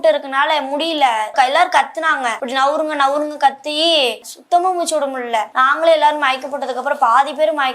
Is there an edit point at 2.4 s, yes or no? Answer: yes